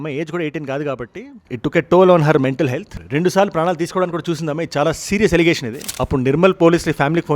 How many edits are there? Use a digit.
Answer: 1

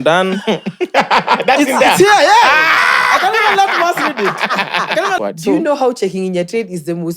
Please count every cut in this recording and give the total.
1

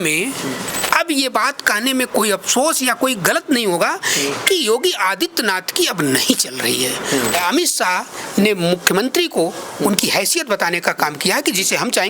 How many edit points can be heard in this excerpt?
2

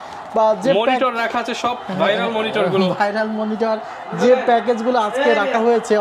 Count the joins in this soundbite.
0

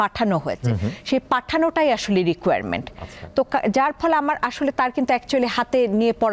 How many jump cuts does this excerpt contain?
0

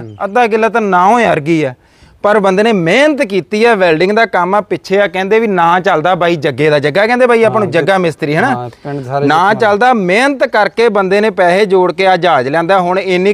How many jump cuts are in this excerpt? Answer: 0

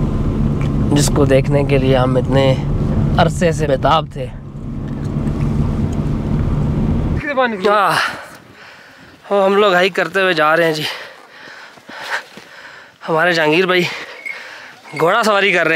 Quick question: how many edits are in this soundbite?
1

